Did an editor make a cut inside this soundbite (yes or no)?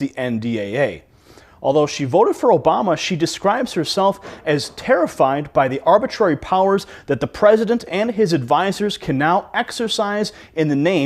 yes